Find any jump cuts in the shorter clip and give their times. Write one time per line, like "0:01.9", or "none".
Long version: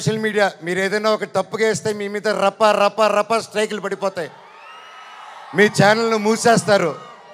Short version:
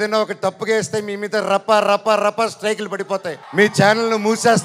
0:03.4